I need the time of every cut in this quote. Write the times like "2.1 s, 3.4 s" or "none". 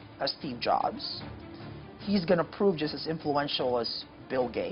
none